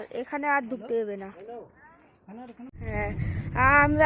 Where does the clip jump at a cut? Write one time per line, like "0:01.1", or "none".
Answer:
0:02.7